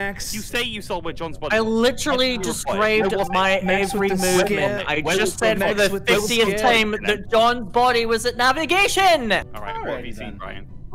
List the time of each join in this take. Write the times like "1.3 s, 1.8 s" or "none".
9.5 s

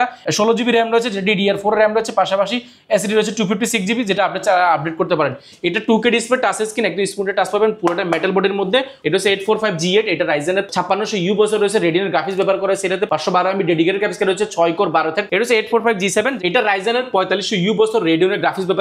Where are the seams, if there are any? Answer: 9.0 s, 15.2 s

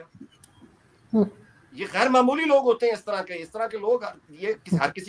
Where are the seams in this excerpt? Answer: none

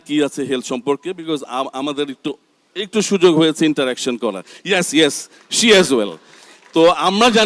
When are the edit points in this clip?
none

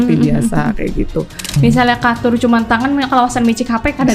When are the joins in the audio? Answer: 1.5 s

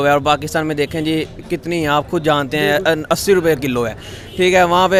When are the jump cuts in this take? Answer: none

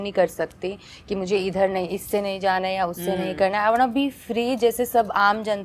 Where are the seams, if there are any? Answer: none

